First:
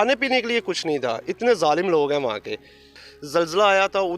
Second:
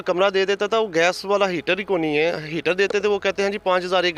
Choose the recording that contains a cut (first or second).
first